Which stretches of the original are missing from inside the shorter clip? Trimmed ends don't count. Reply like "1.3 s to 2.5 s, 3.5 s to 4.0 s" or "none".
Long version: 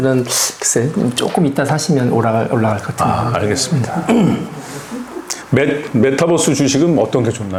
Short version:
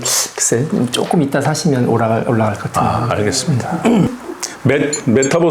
4.3 s to 5.0 s